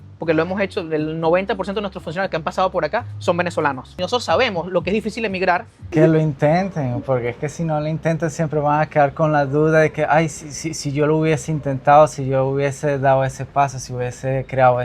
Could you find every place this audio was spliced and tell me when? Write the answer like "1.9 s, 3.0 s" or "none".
5.9 s